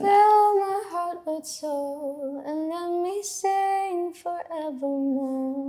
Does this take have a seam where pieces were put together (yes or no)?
no